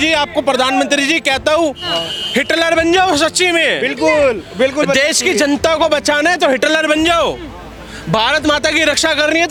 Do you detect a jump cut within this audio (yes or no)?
no